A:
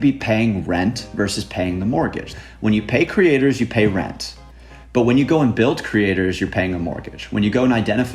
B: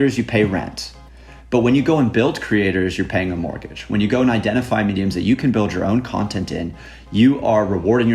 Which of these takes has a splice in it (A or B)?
A